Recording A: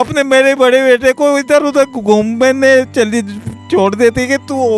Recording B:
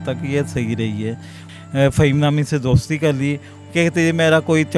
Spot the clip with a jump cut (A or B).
B